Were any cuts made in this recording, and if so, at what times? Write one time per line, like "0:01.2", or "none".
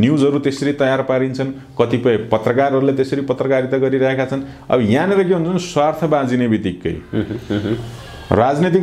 none